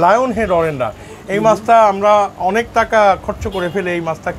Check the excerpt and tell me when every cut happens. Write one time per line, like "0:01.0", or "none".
none